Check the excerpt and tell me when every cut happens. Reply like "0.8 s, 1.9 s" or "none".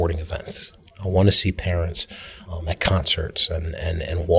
2.4 s

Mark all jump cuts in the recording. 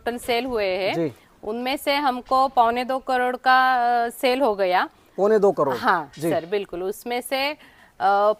none

